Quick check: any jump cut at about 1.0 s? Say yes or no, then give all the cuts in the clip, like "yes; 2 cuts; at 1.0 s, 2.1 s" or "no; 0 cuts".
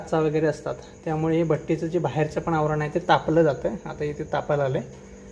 no; 0 cuts